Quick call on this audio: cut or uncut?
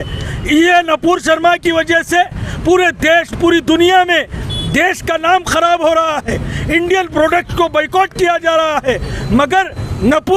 uncut